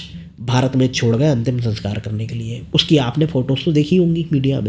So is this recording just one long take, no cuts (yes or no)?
yes